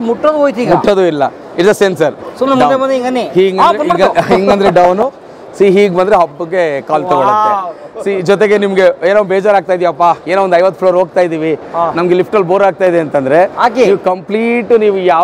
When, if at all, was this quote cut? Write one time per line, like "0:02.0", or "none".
none